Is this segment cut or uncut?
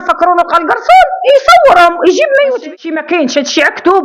cut